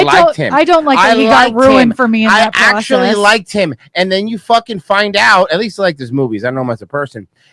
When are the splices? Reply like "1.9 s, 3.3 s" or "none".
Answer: none